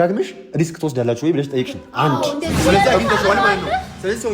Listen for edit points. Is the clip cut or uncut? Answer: cut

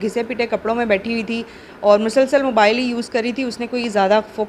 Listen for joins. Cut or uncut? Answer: uncut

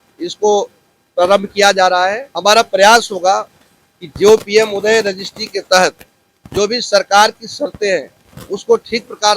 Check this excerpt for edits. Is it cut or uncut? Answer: cut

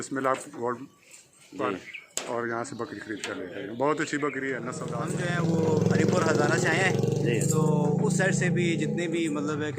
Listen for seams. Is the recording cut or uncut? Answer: cut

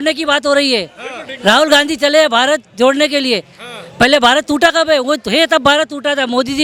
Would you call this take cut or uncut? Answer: uncut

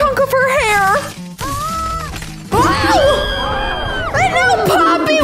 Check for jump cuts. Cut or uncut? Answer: uncut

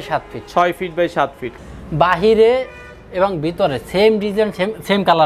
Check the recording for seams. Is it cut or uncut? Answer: cut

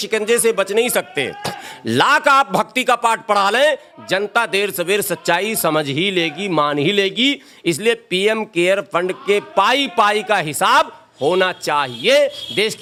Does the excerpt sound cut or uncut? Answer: uncut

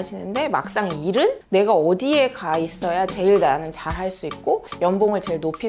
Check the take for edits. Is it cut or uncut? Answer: uncut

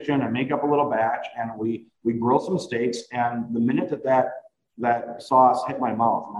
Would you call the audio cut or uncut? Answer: uncut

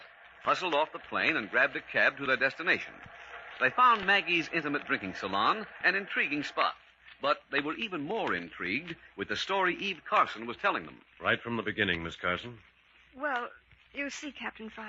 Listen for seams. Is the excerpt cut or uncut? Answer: cut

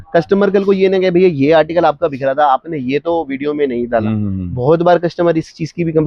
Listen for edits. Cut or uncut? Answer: uncut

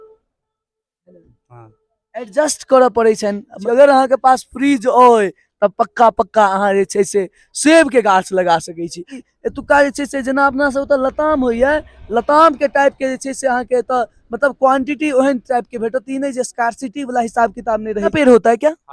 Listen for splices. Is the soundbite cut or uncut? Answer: cut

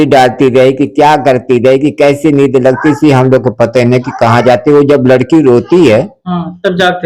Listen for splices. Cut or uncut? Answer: uncut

